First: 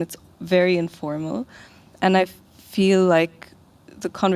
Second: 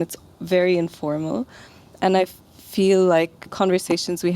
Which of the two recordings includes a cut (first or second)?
second